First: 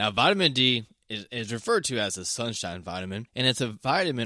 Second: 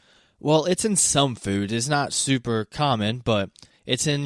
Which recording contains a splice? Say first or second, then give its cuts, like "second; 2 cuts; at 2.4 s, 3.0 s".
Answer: first; 1 cut; at 3.3 s